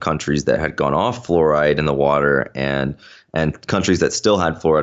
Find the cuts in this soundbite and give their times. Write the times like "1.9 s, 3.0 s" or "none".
none